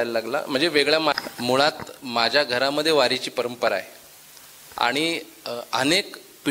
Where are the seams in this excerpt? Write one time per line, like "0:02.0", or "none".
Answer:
0:01.1